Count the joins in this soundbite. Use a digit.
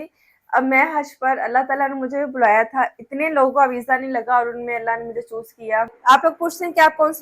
1